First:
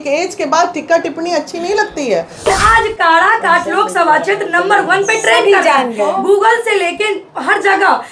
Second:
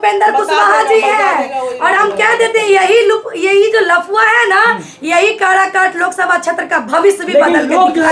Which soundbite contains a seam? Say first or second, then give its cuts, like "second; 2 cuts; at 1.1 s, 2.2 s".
first; 1 cut; at 2.5 s